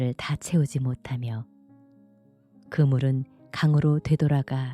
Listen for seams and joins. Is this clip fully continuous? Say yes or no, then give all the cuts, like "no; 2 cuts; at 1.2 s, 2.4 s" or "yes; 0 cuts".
yes; 0 cuts